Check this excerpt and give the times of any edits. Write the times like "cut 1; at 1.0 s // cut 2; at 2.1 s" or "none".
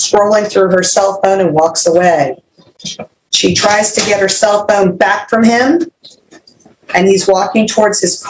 none

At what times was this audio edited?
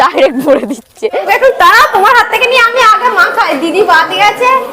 cut 1; at 1.3 s

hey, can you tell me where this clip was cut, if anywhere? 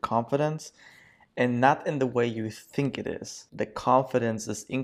cut 1; at 3.4 s

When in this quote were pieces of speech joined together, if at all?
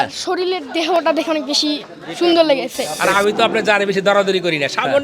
cut 1; at 2.9 s

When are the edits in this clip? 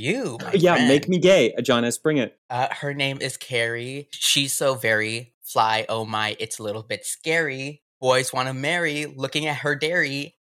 none

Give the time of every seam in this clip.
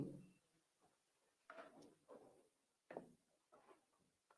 cut 1; at 1.3 s

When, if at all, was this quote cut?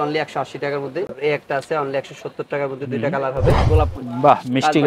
cut 1; at 1.1 s // cut 2; at 3.6 s

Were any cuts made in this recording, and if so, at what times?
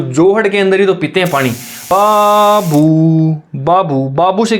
cut 1; at 1.7 s

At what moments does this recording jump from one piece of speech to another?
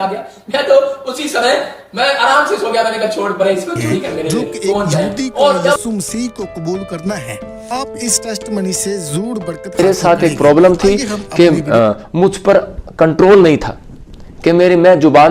cut 1; at 5.8 s // cut 2; at 9.8 s

